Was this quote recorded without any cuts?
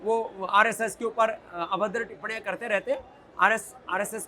yes; 0 cuts

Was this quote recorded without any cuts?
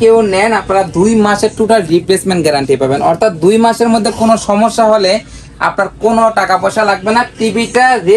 yes; 0 cuts

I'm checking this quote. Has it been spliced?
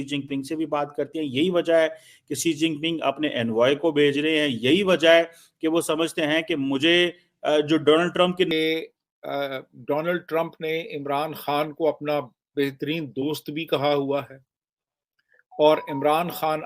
yes; 1 cut; at 8.5 s

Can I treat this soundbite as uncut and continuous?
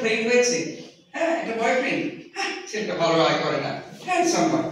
yes; 0 cuts

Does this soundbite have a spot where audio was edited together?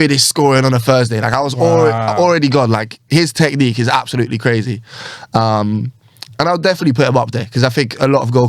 no; 0 cuts

